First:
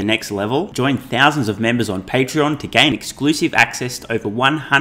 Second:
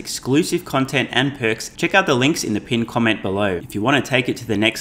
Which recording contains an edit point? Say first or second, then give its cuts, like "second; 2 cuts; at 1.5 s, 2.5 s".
second; 2 cuts; at 1.7 s, 3.6 s